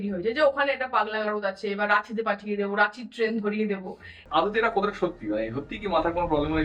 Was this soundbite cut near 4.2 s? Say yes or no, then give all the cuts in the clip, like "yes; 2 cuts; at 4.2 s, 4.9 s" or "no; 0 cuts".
yes; 1 cut; at 4.2 s